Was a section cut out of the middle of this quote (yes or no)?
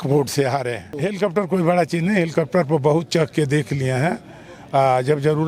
yes